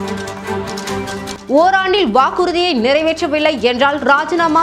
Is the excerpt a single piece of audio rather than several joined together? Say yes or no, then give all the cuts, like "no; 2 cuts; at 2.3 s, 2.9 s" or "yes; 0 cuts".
no; 1 cut; at 1.4 s